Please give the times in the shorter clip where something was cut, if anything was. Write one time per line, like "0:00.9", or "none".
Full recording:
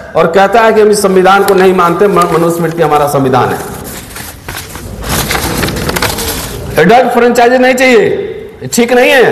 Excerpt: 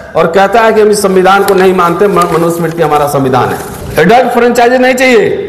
0:03.7